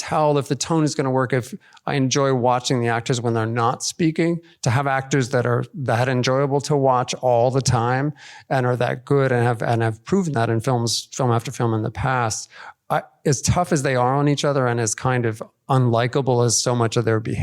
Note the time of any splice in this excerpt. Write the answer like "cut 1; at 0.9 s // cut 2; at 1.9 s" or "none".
cut 1; at 4.5 s